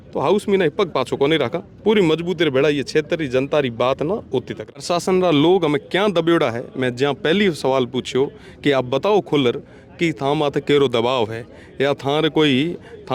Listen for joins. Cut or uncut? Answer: cut